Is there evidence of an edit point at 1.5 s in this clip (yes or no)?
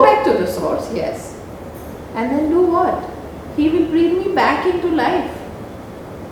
no